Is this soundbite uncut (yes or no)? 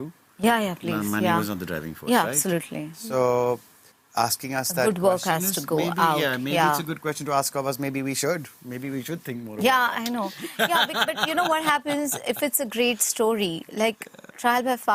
yes